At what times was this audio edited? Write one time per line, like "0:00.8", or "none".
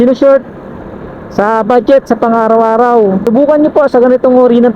0:03.2

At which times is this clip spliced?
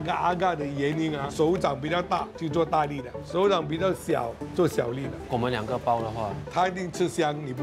0:01.3
0:02.4
0:05.2
0:06.4

